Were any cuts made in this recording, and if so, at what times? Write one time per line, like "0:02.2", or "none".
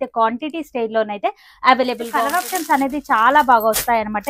0:02.2